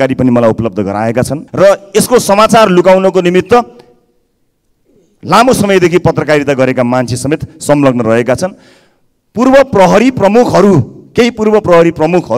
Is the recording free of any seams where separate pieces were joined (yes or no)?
no